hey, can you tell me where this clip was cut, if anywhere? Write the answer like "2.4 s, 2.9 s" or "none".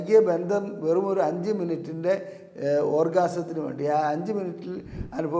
none